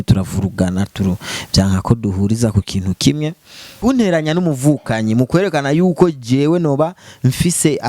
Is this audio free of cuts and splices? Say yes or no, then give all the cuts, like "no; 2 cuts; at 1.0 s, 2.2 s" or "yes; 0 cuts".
no; 1 cut; at 3.8 s